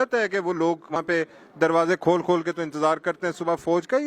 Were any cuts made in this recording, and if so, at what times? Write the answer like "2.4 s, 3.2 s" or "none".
1.0 s